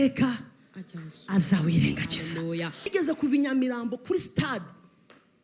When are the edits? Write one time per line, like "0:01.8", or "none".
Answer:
0:02.9